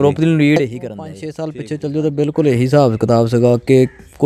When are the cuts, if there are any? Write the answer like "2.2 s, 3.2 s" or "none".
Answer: 1.2 s